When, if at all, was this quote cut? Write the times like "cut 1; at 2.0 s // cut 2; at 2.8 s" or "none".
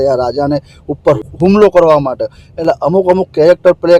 cut 1; at 1.3 s